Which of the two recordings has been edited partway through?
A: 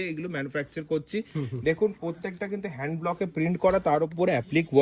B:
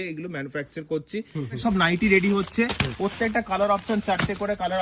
B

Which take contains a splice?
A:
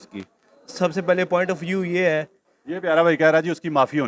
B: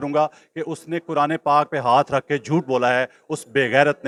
A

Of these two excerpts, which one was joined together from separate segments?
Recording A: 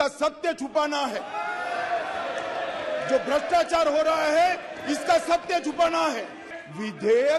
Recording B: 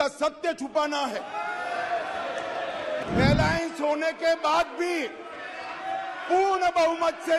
B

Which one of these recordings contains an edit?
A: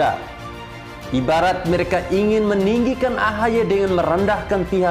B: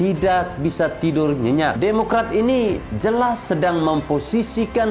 B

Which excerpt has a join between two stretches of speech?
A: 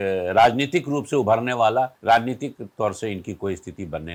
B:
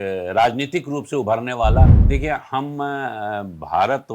B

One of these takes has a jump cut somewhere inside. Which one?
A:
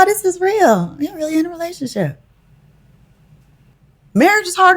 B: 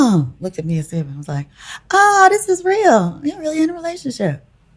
A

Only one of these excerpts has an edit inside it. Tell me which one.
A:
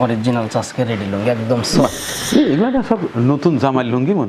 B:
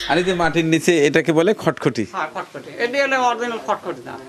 A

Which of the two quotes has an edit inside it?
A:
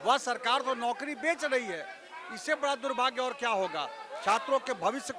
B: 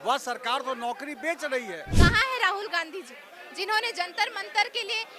B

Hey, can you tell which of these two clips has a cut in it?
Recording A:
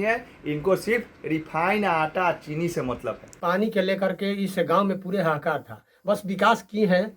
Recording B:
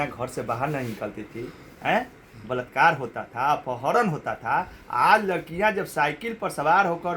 A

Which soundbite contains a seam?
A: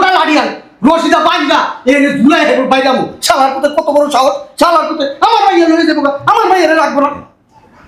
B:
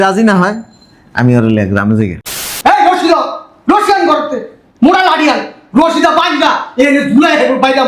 B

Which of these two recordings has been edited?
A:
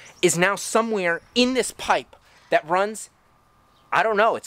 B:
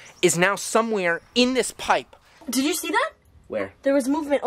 B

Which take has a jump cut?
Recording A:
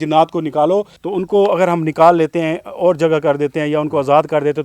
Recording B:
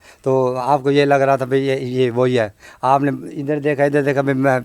A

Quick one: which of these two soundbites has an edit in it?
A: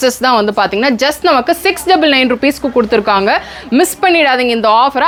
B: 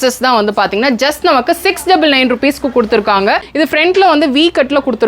B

